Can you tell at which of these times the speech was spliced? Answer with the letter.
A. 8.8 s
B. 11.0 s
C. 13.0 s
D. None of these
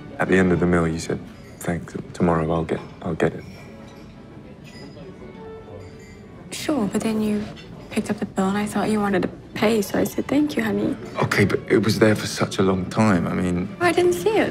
B